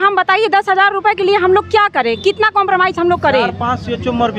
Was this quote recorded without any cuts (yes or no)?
yes